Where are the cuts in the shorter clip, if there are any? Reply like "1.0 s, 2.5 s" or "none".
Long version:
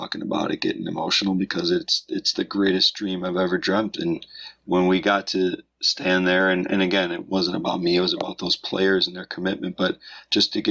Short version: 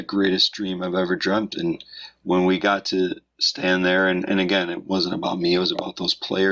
none